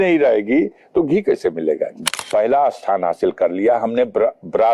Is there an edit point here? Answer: yes; 1 cut; at 2.0 s

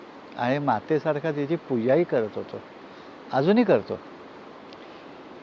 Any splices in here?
yes; 1 cut; at 2.2 s

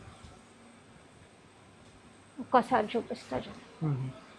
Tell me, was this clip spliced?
no; 0 cuts

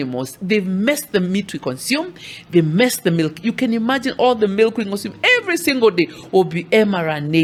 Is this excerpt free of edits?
yes; 0 cuts

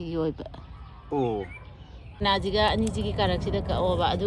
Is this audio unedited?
no; 1 cut; at 2.2 s

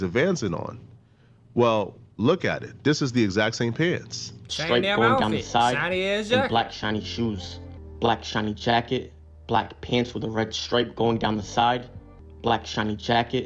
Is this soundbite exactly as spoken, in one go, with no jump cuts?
yes; 0 cuts

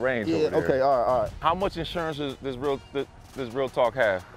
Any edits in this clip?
yes; 1 cut; at 1.4 s

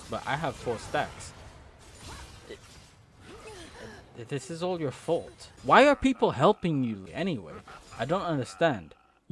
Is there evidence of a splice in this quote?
yes; 2 cuts; at 5.6 s, 7.1 s

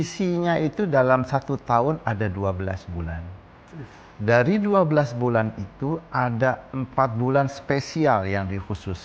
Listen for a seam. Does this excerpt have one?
no; 0 cuts

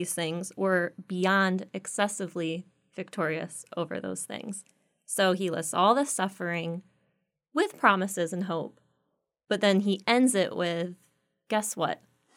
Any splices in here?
no; 0 cuts

